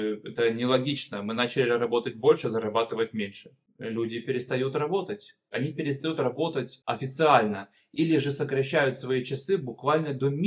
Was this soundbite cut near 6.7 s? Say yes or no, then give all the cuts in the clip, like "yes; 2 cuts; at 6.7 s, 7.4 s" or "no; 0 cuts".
yes; 3 cuts; at 3.6 s, 5.5 s, 6.7 s